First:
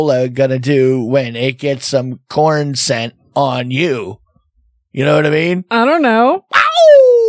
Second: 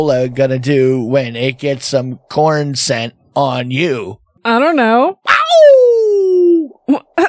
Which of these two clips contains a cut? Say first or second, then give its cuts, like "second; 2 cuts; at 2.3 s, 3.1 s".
second; 1 cut; at 4.4 s